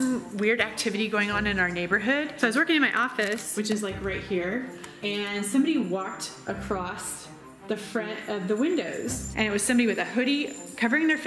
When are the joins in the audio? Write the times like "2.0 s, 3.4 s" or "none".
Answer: 2.3 s, 4.9 s, 9.3 s